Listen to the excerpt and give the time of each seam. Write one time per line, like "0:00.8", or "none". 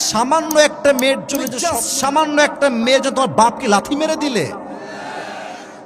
0:01.6